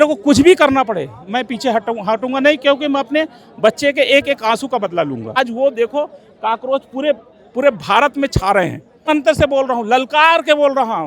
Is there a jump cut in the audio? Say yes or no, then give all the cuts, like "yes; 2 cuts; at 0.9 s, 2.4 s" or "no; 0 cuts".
yes; 2 cuts; at 5.3 s, 9.1 s